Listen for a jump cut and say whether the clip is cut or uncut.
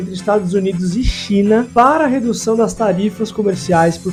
uncut